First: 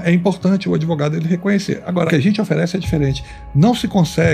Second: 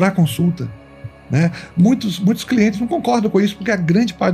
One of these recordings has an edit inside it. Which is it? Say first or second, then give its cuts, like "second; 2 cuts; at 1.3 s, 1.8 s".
first; 1 cut; at 2.1 s